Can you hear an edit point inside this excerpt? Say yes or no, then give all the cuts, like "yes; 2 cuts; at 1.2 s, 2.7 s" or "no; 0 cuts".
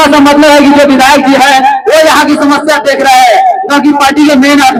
no; 0 cuts